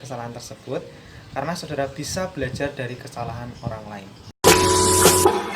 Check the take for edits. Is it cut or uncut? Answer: cut